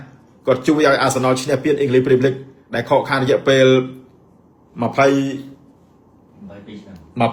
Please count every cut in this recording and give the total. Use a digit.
0